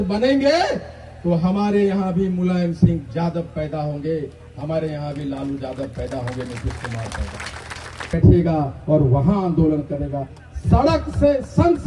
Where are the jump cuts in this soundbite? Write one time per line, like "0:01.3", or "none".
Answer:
0:08.1